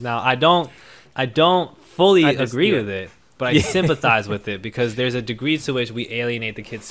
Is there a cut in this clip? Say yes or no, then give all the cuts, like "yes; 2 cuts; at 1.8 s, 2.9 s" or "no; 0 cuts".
no; 0 cuts